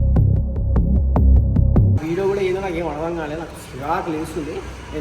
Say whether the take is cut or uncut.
cut